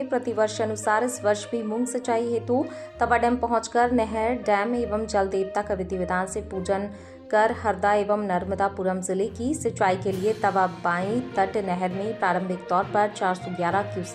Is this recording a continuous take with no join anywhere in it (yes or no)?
yes